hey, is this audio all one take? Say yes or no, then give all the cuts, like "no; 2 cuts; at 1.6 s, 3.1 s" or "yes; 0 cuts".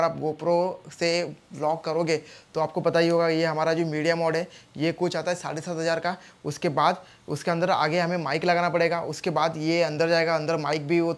yes; 0 cuts